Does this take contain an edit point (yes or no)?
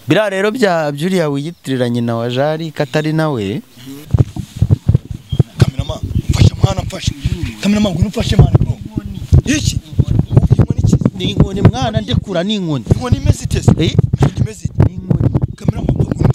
yes